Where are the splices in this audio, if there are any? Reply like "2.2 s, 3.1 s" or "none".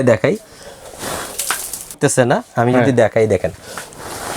2.0 s